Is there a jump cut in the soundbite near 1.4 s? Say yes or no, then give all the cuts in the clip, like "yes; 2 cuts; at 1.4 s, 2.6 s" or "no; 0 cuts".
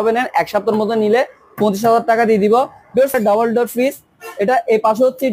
no; 1 cut; at 3.1 s